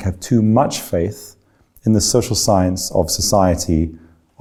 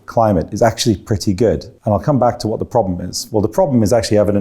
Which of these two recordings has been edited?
second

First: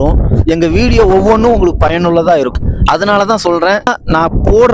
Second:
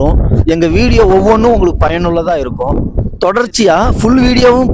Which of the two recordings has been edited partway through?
second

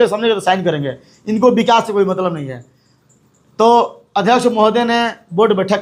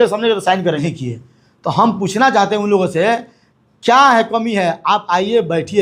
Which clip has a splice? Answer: second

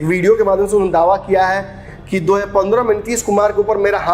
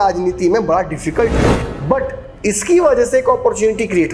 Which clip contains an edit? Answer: second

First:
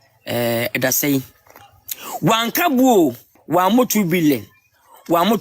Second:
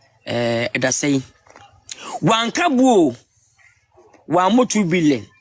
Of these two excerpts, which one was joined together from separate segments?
first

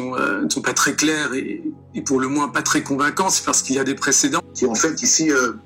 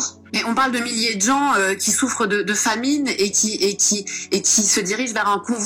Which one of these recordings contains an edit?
first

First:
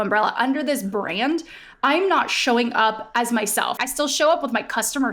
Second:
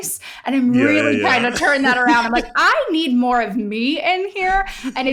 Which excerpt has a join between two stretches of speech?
first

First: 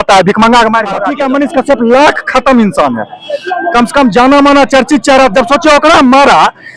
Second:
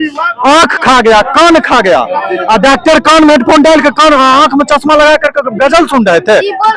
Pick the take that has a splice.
first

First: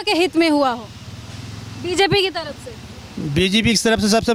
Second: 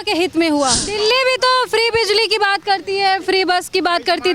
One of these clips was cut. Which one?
second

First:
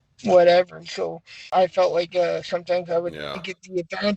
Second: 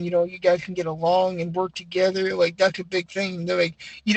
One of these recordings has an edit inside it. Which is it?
first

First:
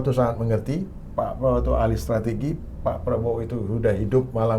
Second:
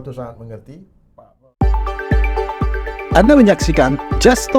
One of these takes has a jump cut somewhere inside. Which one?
second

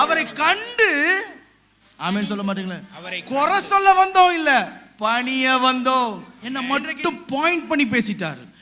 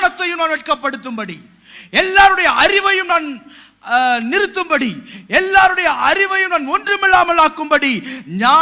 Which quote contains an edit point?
first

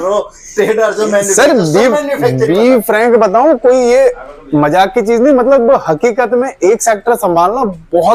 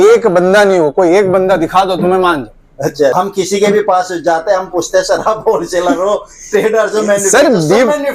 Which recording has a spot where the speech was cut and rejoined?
second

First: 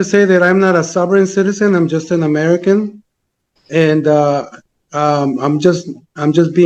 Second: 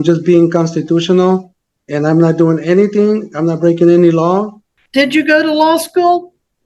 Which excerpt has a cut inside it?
second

